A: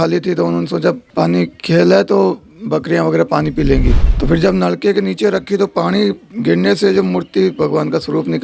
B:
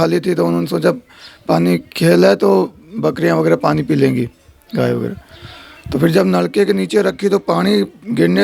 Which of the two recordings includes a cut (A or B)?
A